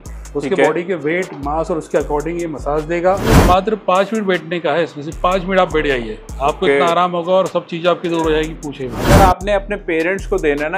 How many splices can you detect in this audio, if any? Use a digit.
2